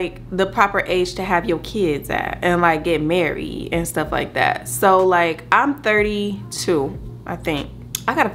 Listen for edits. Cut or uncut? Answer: uncut